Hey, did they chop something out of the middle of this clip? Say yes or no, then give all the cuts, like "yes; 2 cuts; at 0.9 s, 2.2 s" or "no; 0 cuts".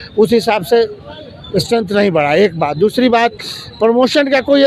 no; 0 cuts